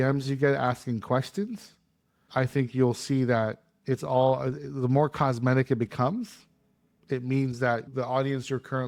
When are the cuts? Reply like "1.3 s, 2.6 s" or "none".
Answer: none